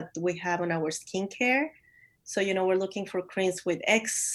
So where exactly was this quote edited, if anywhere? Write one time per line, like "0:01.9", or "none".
none